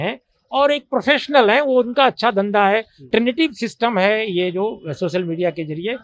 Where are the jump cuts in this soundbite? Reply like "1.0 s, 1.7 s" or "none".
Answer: 3.1 s